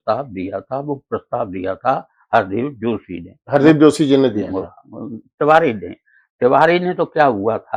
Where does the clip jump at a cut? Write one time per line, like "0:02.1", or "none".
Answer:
none